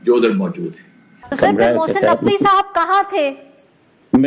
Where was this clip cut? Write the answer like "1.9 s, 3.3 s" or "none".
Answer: 1.2 s